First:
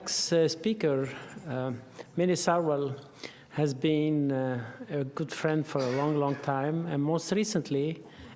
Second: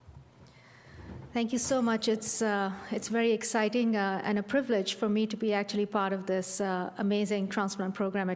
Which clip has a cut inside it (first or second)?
first